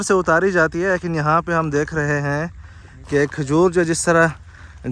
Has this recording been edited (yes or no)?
no